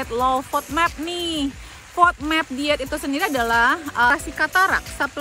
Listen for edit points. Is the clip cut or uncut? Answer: cut